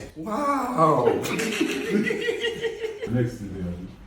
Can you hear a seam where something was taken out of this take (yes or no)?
yes